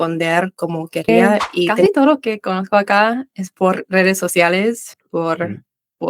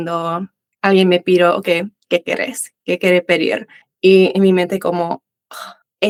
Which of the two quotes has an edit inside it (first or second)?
first